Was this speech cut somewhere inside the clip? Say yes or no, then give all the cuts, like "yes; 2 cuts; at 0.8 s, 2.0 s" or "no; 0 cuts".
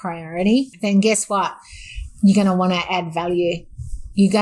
no; 0 cuts